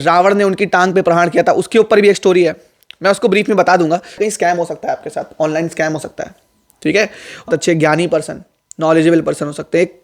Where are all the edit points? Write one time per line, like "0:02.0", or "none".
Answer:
0:04.2
0:07.5